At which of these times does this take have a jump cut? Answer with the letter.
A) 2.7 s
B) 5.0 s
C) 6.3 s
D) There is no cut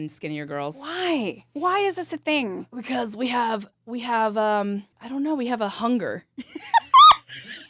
B